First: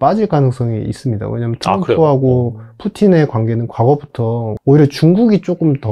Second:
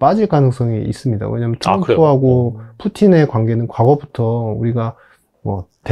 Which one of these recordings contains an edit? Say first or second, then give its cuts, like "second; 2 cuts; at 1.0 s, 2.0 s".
first; 1 cut; at 4.5 s